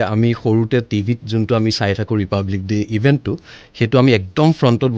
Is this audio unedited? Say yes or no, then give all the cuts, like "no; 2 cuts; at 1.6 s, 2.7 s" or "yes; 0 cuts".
yes; 0 cuts